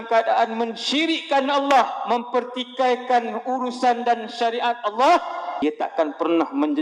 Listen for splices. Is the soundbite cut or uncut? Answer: cut